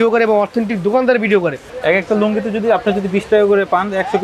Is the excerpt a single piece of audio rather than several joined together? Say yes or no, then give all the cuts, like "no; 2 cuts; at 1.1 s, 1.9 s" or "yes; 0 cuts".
no; 1 cut; at 1.7 s